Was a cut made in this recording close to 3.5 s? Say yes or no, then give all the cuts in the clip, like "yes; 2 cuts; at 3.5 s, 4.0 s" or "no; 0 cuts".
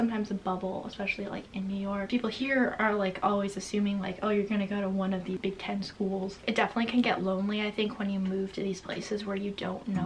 no; 3 cuts; at 2.1 s, 5.4 s, 6.4 s